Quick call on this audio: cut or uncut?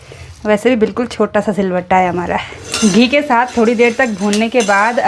cut